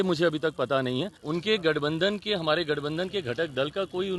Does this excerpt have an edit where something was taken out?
yes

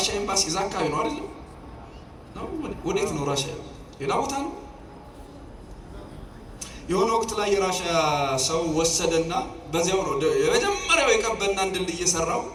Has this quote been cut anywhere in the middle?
no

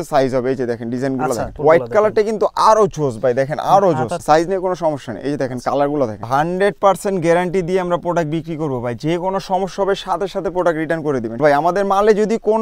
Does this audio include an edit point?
yes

